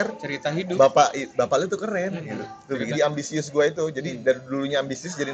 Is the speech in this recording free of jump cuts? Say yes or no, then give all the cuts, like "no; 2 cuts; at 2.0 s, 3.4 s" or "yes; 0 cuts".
no; 1 cut; at 2.9 s